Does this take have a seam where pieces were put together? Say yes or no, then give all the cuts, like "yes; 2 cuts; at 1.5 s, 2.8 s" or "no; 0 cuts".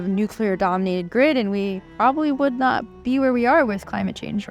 no; 0 cuts